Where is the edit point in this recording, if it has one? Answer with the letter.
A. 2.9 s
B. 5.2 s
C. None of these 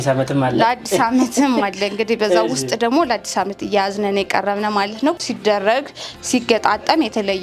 B